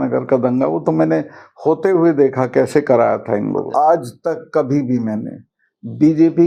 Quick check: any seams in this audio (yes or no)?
yes